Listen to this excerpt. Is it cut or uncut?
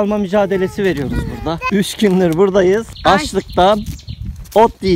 cut